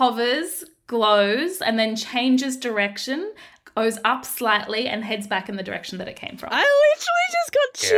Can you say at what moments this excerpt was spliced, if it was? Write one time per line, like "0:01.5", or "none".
0:06.4